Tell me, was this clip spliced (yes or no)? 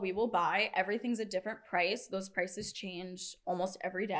no